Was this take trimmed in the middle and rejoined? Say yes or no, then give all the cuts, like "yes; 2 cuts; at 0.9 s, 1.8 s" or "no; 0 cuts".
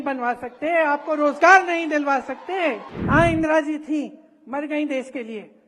yes; 1 cut; at 2.9 s